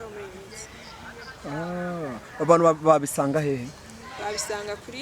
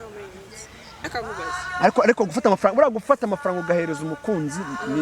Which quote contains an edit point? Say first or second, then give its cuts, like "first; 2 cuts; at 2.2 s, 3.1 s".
second; 1 cut; at 1.0 s